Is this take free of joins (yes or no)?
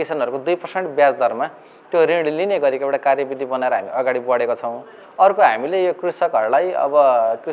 yes